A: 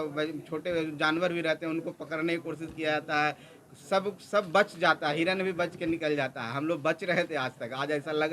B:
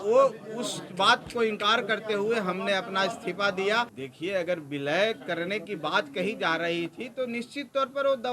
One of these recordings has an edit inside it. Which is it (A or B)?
B